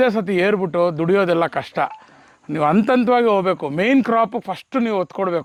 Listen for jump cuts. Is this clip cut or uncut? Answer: uncut